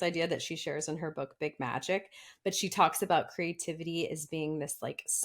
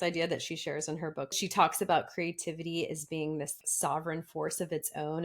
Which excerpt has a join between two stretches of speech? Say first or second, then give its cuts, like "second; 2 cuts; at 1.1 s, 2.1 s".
second; 2 cuts; at 1.4 s, 3.6 s